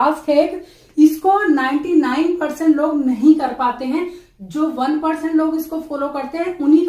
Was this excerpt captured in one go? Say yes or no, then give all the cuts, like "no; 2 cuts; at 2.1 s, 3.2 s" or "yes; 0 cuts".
yes; 0 cuts